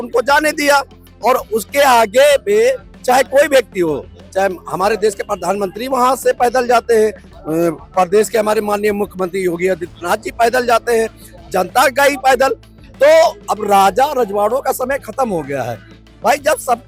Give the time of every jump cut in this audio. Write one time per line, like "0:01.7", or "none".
none